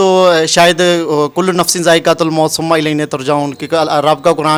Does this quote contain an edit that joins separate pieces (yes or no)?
no